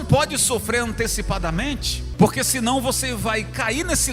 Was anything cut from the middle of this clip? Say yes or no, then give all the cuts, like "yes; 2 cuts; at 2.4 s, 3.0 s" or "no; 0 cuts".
yes; 1 cut; at 2.0 s